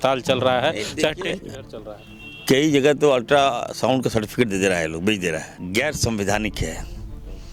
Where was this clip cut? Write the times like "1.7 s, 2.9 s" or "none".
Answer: 5.5 s